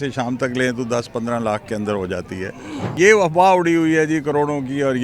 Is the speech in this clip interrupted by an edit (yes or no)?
yes